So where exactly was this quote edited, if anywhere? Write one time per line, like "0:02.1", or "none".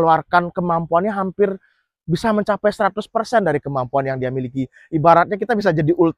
none